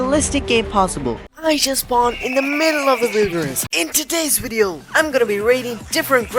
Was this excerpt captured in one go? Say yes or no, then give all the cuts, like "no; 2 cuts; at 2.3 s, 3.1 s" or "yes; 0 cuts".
no; 2 cuts; at 1.2 s, 3.7 s